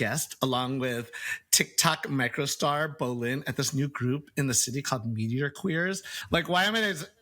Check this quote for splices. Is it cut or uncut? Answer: cut